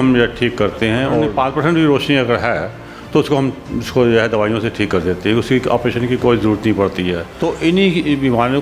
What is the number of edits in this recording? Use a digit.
2